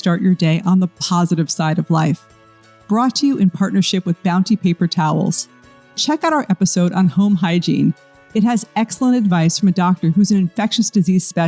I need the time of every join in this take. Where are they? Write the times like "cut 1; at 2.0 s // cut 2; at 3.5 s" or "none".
cut 1; at 2.7 s // cut 2; at 6.0 s